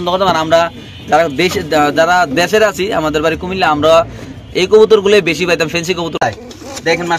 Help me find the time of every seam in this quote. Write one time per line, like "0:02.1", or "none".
0:06.2

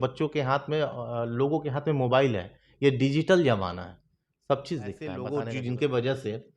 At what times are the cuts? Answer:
0:05.2

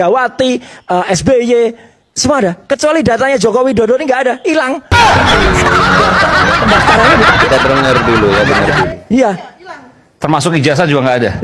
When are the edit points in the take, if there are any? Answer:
none

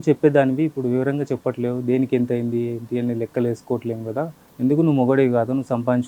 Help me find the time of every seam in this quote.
0:04.4

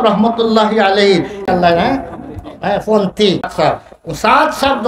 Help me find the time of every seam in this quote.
0:01.4
0:03.5

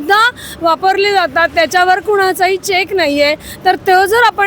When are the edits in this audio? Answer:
none

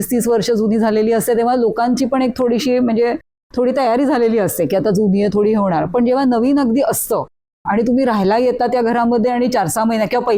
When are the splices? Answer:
none

